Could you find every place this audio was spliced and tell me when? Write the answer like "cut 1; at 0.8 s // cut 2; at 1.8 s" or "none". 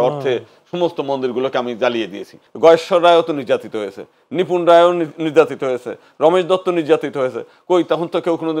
cut 1; at 2.4 s